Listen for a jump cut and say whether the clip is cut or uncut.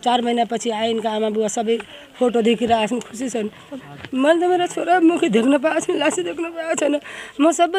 uncut